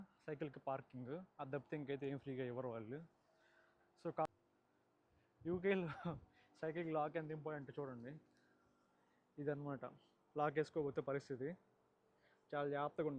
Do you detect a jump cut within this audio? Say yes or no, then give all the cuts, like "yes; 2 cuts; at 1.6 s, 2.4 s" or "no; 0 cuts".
yes; 1 cut; at 4.2 s